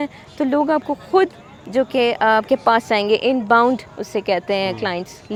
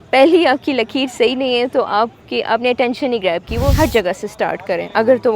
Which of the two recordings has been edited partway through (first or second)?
second